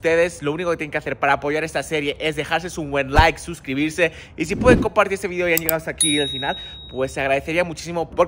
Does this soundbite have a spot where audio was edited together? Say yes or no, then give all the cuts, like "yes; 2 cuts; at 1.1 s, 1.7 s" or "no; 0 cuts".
no; 0 cuts